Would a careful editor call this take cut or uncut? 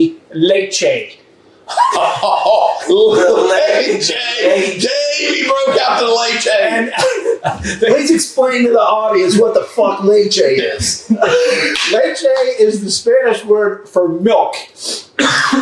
uncut